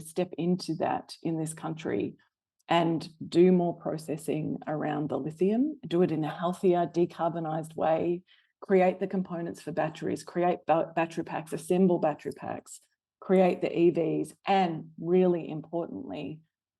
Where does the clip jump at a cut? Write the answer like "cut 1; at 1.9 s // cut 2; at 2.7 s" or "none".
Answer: none